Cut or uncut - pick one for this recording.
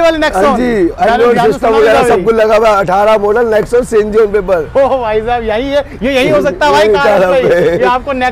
uncut